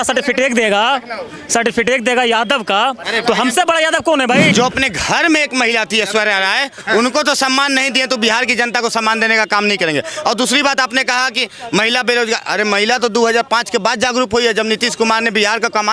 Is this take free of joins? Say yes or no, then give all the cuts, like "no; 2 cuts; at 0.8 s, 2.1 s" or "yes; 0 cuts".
no; 1 cut; at 4.5 s